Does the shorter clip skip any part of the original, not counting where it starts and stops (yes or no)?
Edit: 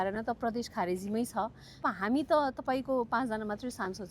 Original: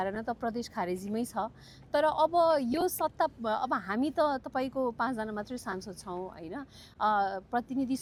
yes